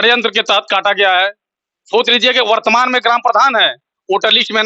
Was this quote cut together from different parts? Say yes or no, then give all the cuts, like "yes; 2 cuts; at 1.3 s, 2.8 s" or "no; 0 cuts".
no; 0 cuts